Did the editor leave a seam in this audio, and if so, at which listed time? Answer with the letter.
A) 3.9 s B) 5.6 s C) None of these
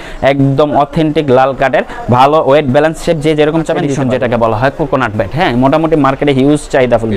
A